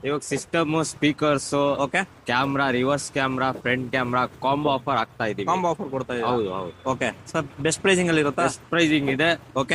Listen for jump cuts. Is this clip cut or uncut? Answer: uncut